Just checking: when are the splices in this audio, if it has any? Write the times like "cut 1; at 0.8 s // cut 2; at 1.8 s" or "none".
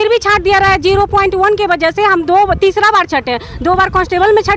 none